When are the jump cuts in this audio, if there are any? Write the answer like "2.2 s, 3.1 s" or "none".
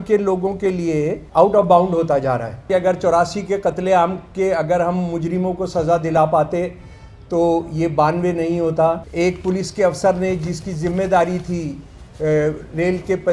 1.2 s, 2.7 s, 9.1 s